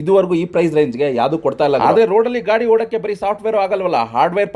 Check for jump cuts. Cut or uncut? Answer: cut